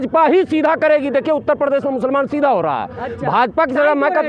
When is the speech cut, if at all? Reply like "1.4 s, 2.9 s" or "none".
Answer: none

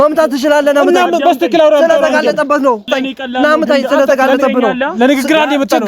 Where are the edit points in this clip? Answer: 2.9 s

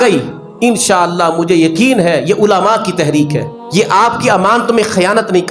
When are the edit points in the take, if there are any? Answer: 3.6 s

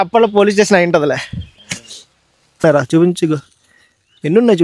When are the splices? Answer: 2.6 s

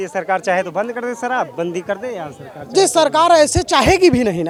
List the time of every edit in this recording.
none

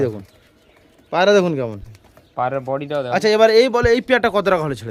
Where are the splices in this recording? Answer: none

